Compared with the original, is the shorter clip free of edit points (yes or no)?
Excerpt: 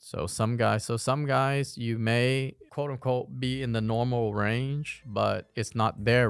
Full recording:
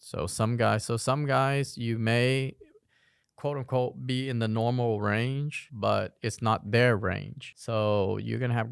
no